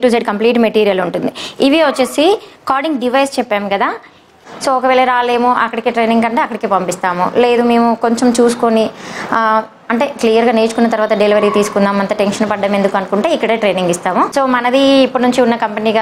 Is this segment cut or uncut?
cut